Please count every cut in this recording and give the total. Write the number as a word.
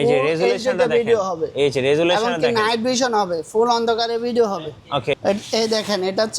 one